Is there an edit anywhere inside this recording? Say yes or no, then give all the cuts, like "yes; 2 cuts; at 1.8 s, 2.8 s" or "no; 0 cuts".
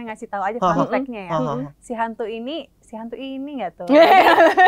no; 0 cuts